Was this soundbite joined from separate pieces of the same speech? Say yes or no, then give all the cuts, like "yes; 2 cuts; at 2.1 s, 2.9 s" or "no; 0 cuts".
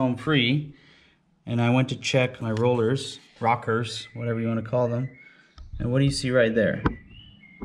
yes; 1 cut; at 2.4 s